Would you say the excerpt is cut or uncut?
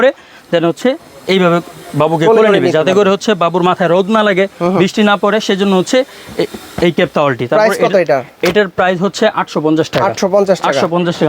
uncut